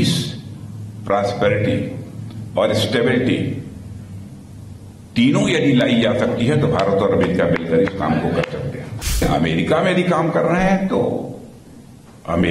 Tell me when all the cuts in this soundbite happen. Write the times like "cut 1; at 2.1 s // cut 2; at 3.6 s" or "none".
cut 1; at 9.2 s